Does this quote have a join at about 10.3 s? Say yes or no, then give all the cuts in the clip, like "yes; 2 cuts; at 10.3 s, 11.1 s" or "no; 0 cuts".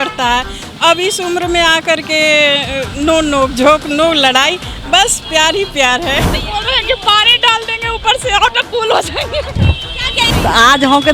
yes; 2 cuts; at 6.4 s, 10.3 s